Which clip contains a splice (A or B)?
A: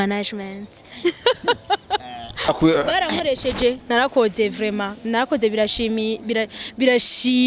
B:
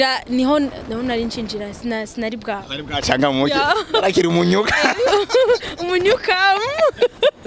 A